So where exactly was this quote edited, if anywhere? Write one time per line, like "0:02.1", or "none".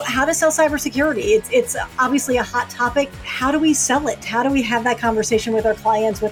0:03.1